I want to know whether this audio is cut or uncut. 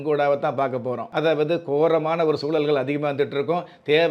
cut